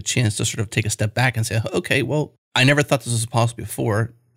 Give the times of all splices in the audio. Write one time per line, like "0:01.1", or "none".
0:02.4